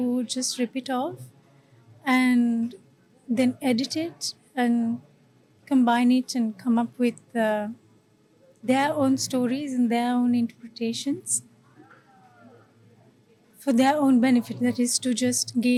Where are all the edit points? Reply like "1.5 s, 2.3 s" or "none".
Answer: none